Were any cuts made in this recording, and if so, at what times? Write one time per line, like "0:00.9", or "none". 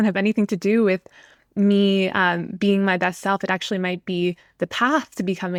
none

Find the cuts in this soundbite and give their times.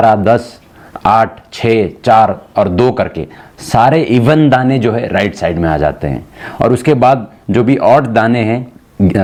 none

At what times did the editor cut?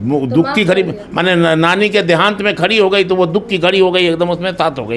none

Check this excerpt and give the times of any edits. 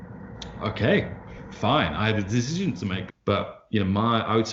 0:03.1

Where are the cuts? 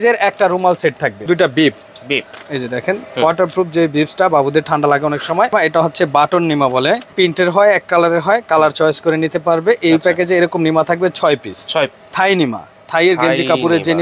0:01.2
0:05.5
0:07.1
0:12.0

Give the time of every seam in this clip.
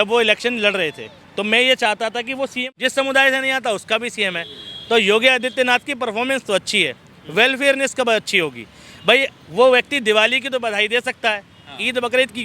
0:02.6

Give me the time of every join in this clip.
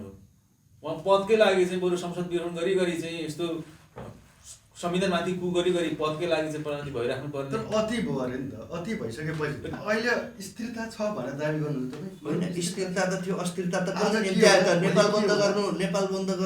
0:09.8

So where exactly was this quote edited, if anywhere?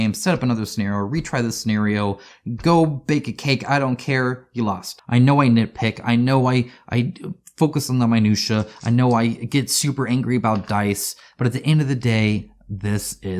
0:04.9

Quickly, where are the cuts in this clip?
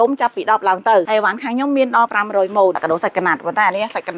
0:01.1
0:02.8

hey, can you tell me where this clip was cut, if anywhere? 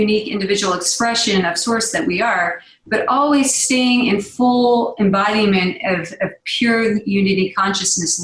none

